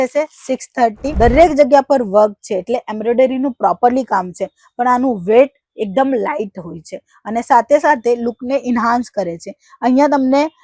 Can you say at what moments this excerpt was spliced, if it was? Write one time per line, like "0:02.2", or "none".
0:01.1